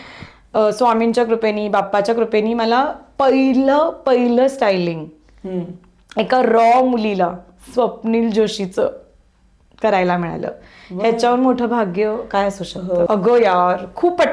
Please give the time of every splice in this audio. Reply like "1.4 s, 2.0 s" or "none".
13.1 s